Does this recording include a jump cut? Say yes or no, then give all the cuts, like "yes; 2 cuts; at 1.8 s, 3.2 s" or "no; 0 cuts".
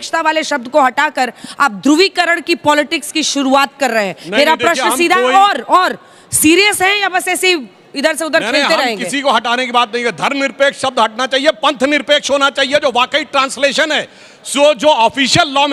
no; 0 cuts